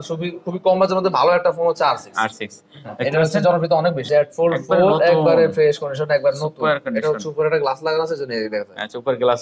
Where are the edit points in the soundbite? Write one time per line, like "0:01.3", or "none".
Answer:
0:04.0